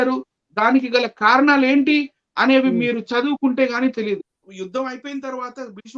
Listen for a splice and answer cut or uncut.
cut